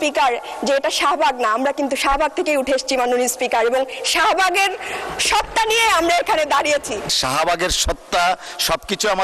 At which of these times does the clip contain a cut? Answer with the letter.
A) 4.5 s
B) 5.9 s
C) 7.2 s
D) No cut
C